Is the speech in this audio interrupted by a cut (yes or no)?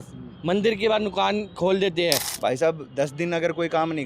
yes